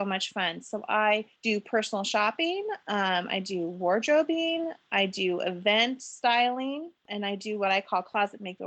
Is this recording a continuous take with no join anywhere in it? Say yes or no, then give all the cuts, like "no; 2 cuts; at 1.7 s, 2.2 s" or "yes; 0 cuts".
no; 2 cuts; at 1.3 s, 7.0 s